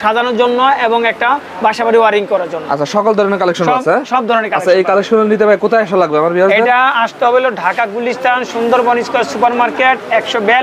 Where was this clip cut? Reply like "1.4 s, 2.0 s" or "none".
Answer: none